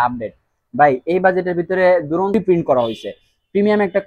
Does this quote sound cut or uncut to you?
cut